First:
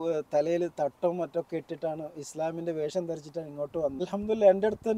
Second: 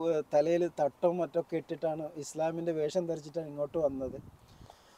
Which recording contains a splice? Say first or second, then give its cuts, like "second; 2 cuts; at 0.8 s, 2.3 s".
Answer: first; 1 cut; at 4.0 s